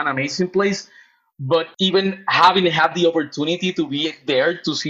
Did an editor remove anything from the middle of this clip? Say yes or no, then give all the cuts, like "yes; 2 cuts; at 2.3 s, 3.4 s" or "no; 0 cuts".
yes; 1 cut; at 1.7 s